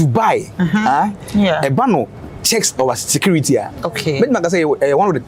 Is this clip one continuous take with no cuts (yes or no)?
yes